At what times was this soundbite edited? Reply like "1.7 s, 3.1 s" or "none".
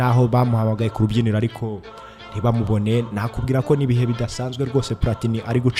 none